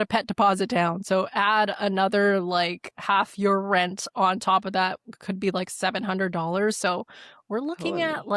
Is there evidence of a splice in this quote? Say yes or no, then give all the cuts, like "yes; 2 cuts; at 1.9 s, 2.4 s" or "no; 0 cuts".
no; 0 cuts